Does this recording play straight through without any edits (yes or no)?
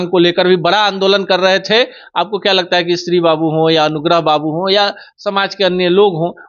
yes